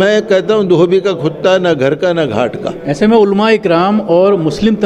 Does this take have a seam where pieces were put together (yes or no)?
no